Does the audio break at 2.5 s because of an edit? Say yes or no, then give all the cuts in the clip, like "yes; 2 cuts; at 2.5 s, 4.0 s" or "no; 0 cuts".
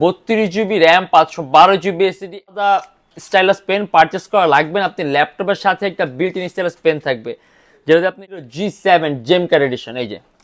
yes; 2 cuts; at 2.5 s, 8.4 s